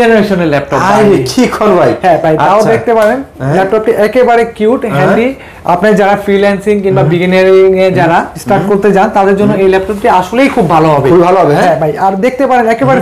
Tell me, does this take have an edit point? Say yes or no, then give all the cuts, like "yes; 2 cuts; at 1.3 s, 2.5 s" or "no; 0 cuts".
no; 0 cuts